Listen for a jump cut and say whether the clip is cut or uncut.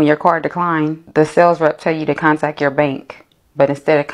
uncut